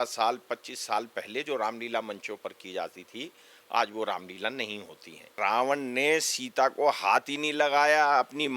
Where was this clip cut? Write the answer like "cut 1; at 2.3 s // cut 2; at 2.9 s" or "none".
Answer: cut 1; at 5.4 s